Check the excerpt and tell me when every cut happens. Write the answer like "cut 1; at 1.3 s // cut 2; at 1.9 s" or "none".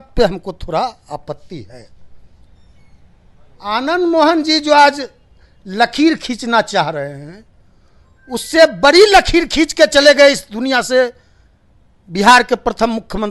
none